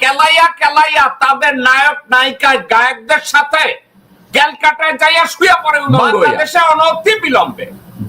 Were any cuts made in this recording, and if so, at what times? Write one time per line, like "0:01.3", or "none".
0:06.3